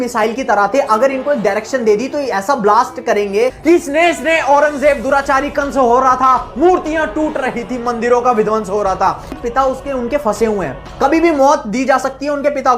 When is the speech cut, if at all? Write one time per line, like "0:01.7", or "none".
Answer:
0:03.6
0:09.3